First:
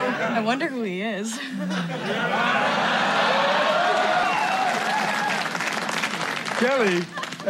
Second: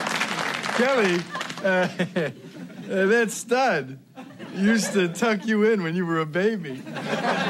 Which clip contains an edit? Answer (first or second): first